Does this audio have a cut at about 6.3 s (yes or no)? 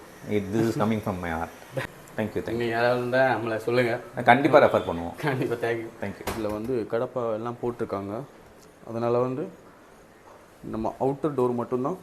yes